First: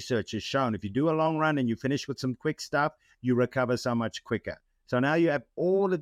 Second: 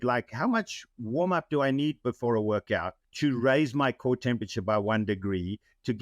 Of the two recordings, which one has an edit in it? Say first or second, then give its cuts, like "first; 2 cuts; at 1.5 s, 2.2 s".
second; 1 cut; at 3.0 s